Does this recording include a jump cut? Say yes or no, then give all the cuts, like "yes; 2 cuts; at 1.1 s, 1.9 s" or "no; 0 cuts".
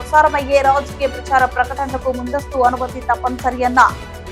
no; 0 cuts